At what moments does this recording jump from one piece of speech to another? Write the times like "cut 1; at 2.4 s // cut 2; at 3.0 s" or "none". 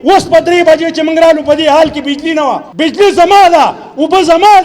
cut 1; at 2.7 s